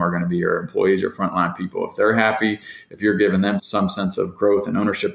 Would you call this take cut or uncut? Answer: uncut